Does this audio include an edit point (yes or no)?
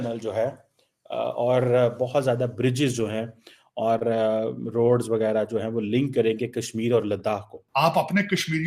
yes